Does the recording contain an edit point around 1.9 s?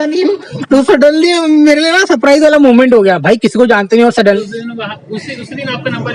no; 1 cut; at 4.4 s

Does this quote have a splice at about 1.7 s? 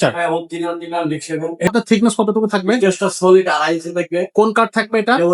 yes; 1 cut; at 1.7 s

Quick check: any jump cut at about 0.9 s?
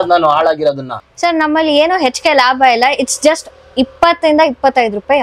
yes; 1 cut; at 0.9 s

